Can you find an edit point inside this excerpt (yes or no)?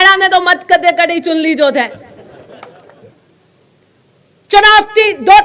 yes